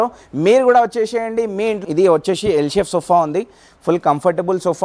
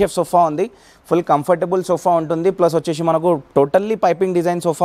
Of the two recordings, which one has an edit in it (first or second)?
first